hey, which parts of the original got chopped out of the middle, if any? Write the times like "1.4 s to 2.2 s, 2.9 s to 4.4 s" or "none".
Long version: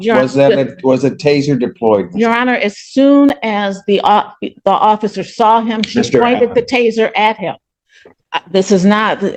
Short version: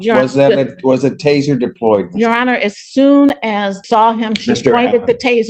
3.8 s to 5.2 s